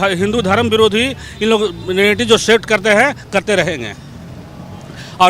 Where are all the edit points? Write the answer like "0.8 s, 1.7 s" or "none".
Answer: none